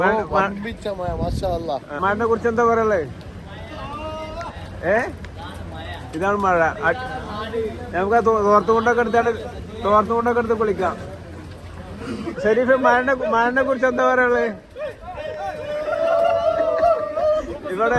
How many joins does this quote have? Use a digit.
1